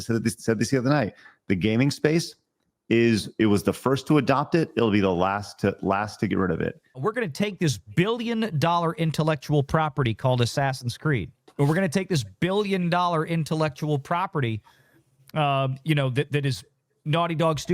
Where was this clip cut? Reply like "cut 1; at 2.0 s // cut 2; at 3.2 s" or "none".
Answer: cut 1; at 7.0 s // cut 2; at 11.4 s